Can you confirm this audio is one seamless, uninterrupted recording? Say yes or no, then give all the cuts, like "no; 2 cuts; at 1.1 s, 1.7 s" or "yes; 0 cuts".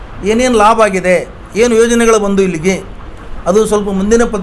yes; 0 cuts